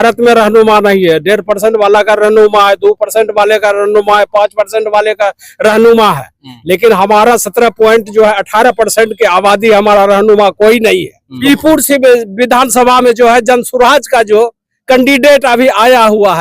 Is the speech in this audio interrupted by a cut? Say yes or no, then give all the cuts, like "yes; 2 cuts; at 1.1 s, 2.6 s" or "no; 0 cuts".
yes; 1 cut; at 11.3 s